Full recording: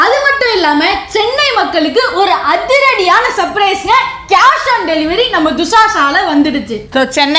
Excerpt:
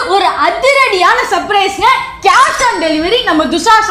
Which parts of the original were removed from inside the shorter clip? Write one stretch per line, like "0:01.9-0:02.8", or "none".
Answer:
none